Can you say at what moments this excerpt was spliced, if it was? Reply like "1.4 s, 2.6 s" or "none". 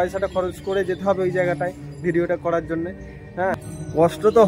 3.5 s